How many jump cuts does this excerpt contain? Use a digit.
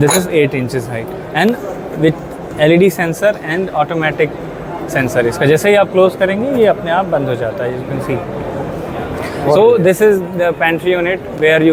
0